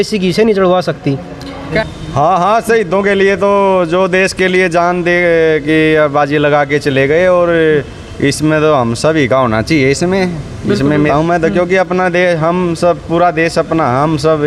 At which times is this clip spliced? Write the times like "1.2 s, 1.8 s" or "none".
1.8 s, 11.1 s